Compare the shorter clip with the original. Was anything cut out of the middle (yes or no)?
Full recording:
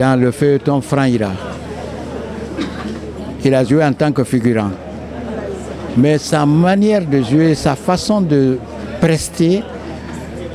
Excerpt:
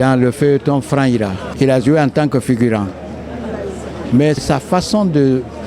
yes